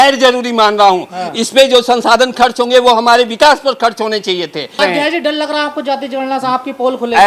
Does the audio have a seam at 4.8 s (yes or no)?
yes